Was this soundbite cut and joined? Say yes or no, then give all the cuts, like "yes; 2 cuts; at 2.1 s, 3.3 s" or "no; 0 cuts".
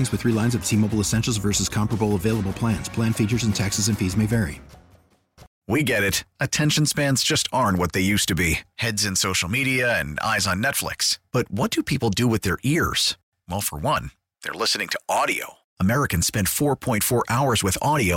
yes; 1 cut; at 5.5 s